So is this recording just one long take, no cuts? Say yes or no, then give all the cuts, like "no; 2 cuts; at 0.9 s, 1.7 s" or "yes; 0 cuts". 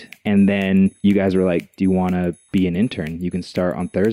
no; 1 cut; at 1.0 s